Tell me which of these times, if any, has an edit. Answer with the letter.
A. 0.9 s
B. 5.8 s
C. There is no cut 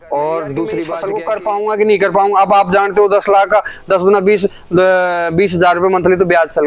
A